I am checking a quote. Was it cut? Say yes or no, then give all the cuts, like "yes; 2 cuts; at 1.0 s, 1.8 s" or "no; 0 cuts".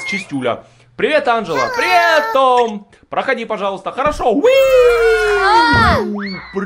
no; 0 cuts